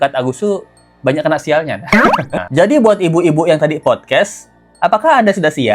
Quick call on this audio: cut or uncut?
cut